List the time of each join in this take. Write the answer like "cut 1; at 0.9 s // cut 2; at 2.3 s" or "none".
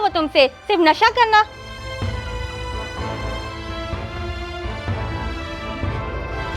cut 1; at 1.6 s